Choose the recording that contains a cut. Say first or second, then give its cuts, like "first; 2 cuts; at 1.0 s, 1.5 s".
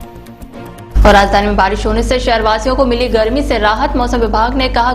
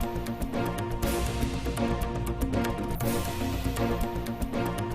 first; 1 cut; at 0.9 s